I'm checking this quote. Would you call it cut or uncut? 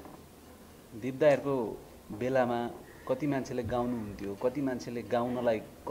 uncut